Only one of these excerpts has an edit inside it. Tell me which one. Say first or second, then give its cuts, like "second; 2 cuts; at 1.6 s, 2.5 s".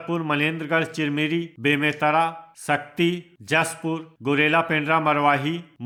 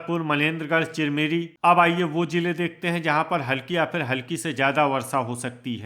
second; 1 cut; at 1.5 s